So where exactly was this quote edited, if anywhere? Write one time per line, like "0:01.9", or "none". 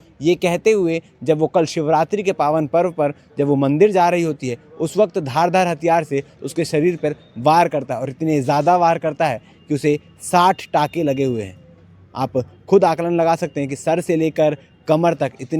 none